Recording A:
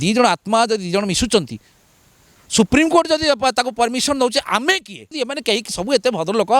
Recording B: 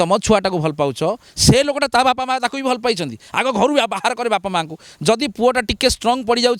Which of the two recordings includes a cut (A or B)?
A